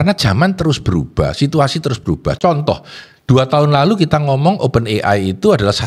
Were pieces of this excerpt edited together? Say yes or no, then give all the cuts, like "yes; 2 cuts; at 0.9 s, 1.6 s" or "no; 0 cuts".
no; 0 cuts